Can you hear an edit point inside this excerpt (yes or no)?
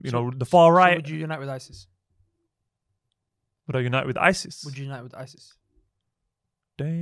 no